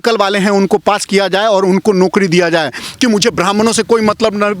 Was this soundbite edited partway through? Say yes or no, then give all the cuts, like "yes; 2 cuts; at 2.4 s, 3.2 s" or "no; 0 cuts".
yes; 1 cut; at 2.9 s